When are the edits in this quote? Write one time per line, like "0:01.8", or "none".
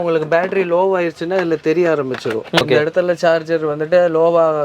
0:02.6